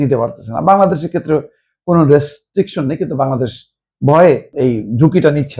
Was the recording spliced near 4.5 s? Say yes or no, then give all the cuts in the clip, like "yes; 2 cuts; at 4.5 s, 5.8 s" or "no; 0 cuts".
yes; 1 cut; at 4.5 s